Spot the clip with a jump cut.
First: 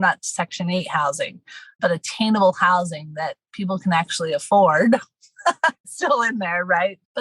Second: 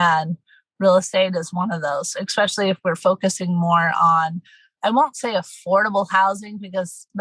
first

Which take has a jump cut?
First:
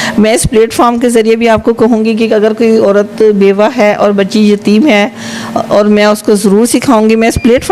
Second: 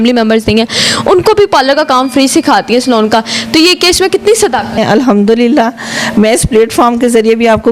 second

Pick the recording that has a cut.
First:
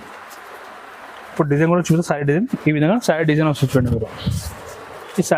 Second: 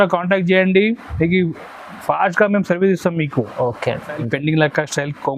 second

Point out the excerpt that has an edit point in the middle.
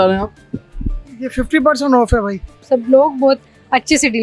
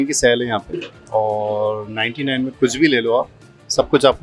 first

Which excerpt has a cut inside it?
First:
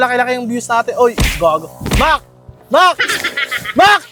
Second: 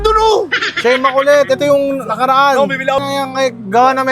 second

